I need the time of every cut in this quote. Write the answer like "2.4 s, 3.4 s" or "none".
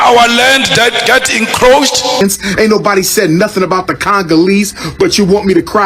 2.2 s